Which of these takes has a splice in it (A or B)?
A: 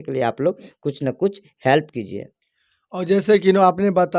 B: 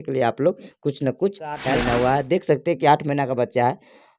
B